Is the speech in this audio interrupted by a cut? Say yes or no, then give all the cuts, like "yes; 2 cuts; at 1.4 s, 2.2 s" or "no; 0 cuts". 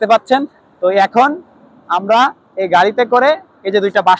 no; 0 cuts